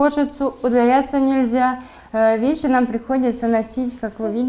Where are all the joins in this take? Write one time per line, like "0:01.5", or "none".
none